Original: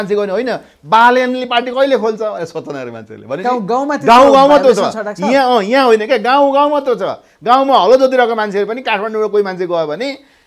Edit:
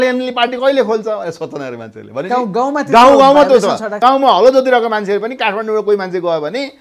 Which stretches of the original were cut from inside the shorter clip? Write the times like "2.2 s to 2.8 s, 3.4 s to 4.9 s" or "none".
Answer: 5.0 s to 7.3 s